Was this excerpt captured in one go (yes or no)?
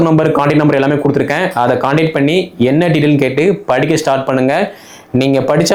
yes